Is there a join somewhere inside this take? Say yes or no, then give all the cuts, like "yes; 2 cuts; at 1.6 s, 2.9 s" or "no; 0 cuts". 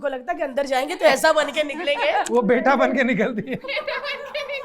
yes; 2 cuts; at 2.3 s, 3.6 s